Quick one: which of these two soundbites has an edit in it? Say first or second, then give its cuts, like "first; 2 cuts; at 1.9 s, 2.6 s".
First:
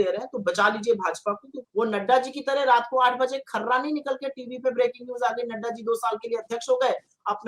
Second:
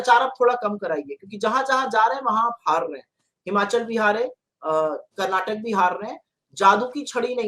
first; 1 cut; at 1.5 s